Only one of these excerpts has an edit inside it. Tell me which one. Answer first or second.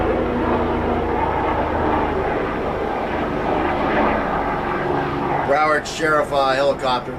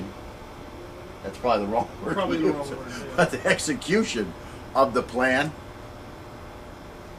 second